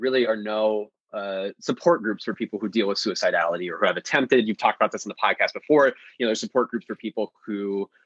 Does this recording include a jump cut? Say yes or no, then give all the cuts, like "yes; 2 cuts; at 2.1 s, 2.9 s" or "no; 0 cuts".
no; 0 cuts